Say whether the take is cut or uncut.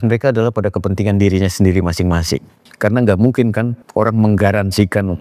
cut